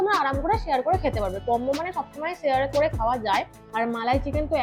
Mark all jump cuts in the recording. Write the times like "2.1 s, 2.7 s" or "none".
3.6 s